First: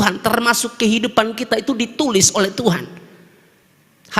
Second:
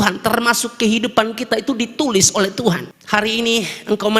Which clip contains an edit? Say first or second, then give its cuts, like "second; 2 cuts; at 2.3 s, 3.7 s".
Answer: second; 1 cut; at 2.9 s